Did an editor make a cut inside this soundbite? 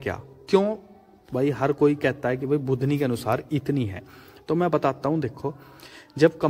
no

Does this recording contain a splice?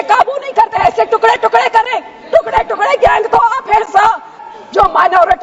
yes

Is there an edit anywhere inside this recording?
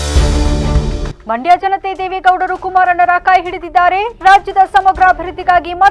no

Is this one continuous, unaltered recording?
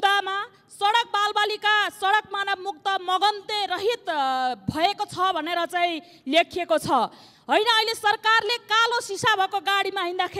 yes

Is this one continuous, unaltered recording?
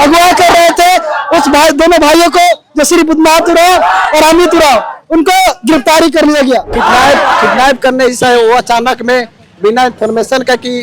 no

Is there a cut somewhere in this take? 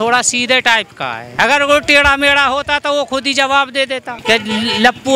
yes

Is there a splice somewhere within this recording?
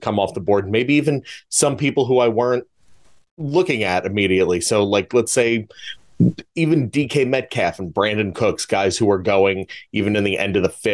no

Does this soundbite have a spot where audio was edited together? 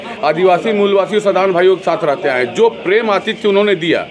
no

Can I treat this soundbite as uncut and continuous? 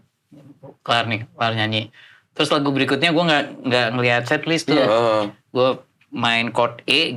yes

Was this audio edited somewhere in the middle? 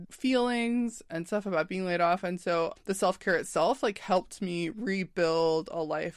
yes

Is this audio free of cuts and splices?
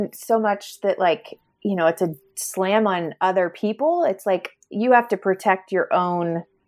yes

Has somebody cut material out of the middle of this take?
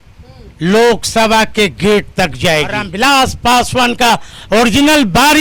yes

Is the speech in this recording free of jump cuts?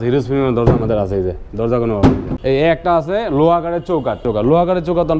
no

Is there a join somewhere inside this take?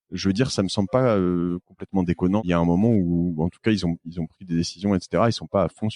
yes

